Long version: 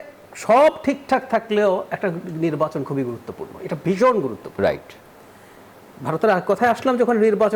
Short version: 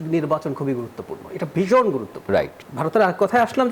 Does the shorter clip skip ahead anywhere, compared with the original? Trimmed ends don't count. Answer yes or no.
yes